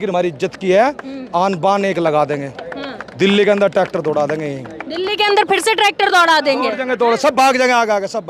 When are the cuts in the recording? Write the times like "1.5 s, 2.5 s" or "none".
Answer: none